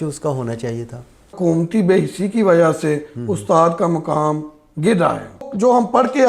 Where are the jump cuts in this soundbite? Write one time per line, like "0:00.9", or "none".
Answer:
0:01.3
0:05.5